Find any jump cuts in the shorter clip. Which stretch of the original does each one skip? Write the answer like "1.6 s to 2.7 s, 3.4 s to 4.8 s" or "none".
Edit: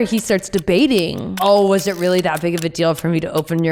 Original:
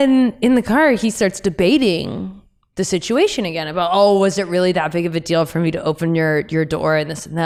2.3 s to 3.9 s